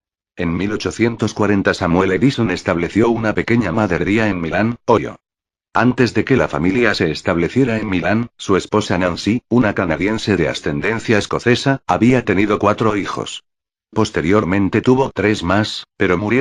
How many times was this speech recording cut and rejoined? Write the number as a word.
one